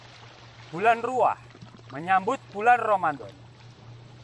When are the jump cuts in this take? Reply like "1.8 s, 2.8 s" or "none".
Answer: none